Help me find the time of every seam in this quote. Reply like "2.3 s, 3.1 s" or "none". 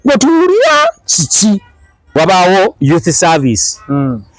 2.1 s